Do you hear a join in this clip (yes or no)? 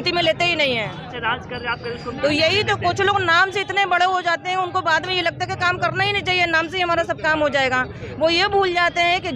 no